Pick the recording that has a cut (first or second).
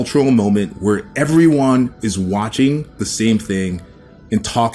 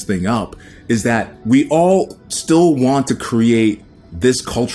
second